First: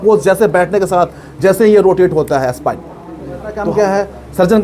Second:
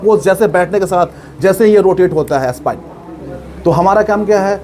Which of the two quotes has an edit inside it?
first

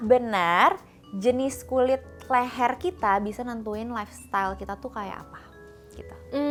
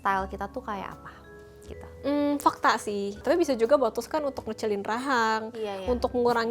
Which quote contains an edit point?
second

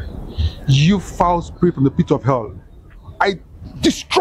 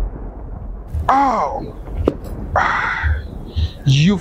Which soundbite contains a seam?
second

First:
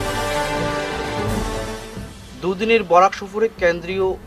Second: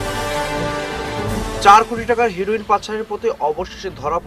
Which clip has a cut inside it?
second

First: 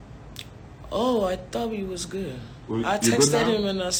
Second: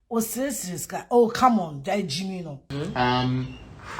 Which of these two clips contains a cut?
second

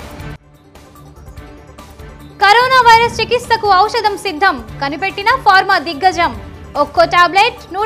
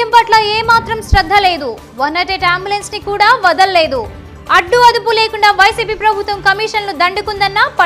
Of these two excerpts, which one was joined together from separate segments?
first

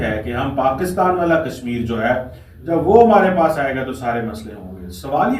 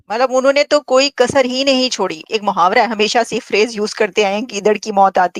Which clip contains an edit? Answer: second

